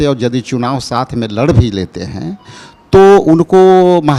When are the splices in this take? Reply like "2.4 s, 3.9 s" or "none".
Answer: none